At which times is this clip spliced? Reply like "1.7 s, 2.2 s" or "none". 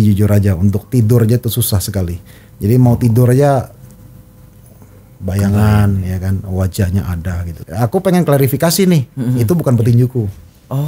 7.6 s